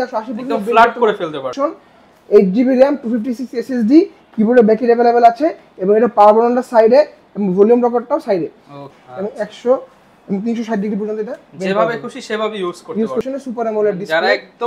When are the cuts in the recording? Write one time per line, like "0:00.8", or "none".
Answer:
0:01.5
0:08.9
0:13.2